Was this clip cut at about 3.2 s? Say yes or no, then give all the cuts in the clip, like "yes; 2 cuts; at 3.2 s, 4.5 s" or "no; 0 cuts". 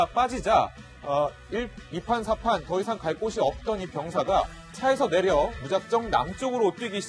no; 0 cuts